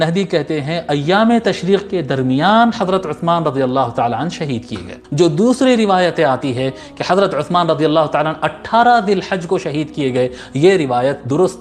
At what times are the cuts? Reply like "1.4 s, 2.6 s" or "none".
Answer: 5.0 s